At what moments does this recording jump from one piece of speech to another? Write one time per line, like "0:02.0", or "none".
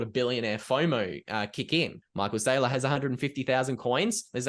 0:02.0